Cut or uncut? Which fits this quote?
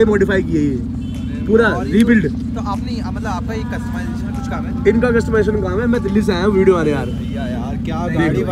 uncut